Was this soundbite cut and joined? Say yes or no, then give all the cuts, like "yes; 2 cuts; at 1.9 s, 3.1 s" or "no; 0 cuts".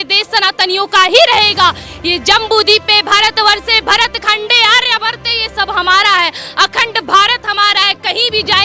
no; 0 cuts